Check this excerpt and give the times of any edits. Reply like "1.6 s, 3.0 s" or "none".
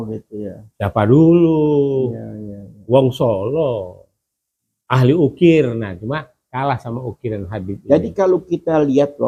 none